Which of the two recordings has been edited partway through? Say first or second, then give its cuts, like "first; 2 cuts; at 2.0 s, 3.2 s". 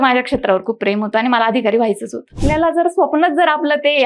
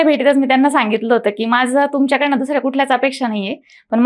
first; 1 cut; at 2.4 s